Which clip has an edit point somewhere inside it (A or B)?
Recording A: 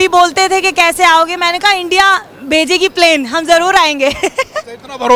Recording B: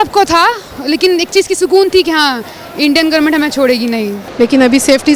B